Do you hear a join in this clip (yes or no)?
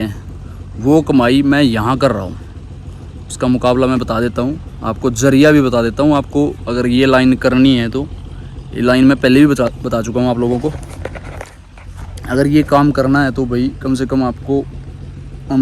no